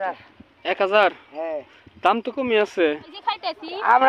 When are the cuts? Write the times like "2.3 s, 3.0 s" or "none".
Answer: 3.1 s